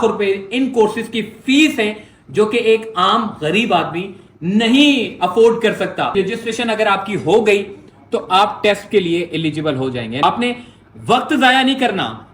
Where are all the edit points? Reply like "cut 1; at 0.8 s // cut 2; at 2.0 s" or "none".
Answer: cut 1; at 6.1 s // cut 2; at 10.2 s